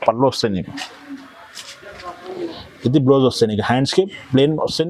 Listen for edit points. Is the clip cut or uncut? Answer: uncut